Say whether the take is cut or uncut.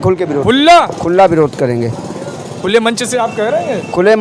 uncut